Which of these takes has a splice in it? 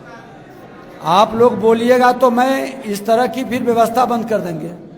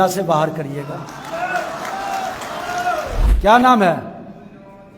second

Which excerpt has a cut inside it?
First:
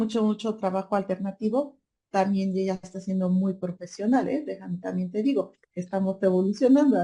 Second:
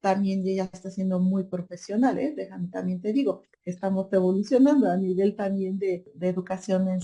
second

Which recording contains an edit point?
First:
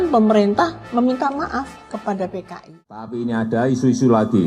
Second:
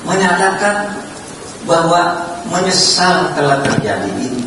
first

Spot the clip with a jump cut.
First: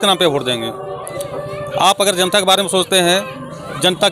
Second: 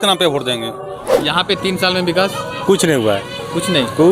second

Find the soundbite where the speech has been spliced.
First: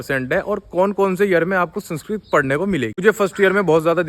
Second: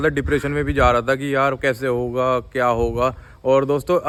first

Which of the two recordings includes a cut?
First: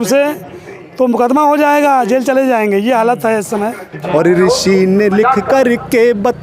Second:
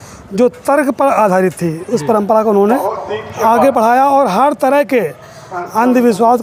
first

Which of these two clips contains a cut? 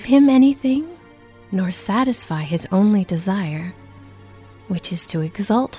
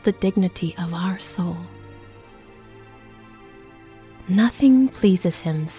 second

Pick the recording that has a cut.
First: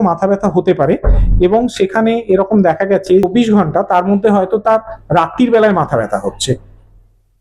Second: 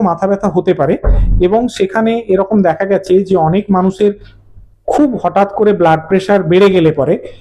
first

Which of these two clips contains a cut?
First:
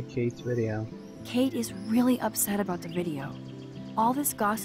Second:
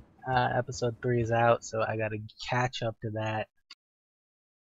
first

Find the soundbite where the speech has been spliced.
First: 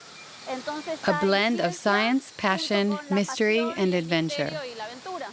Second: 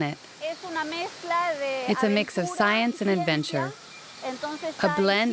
first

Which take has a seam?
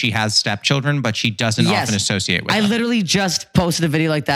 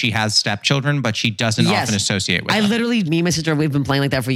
second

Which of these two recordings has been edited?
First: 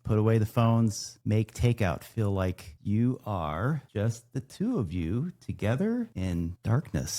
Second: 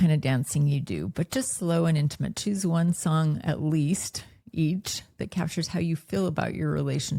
first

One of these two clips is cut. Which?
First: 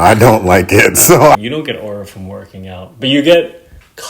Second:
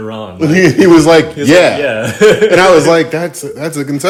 first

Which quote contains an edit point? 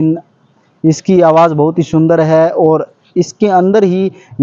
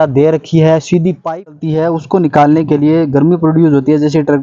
second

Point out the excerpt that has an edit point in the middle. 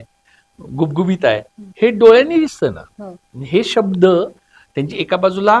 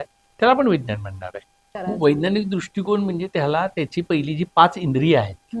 second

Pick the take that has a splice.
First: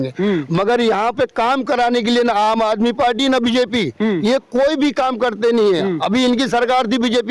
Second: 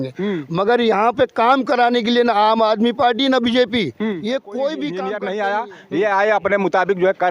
second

